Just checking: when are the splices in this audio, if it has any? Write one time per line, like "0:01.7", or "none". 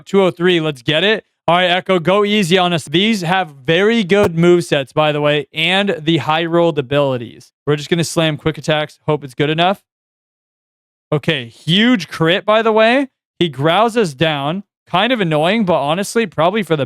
0:01.3
0:02.8
0:07.4